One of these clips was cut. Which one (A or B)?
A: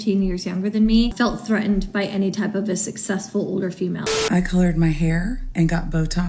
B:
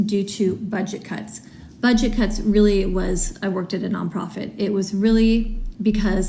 A